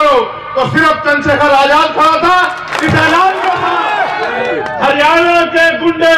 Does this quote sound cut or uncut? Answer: cut